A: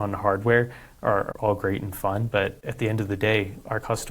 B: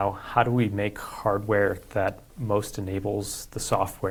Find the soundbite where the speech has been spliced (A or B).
A